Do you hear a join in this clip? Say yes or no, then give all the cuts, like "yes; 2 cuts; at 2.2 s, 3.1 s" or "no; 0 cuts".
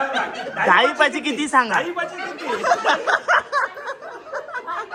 no; 0 cuts